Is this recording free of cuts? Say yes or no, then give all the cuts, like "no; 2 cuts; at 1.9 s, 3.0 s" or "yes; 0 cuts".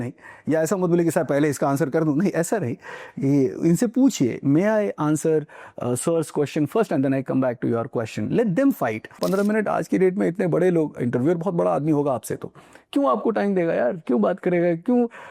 no; 1 cut; at 9.2 s